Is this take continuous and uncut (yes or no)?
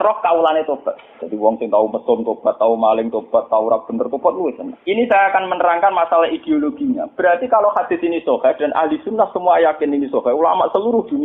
no